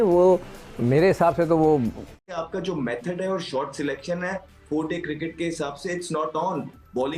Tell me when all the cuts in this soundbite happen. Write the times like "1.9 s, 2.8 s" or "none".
2.2 s